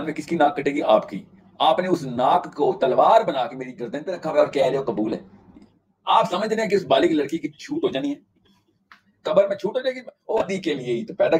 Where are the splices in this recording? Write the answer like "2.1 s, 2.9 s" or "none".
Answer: 10.4 s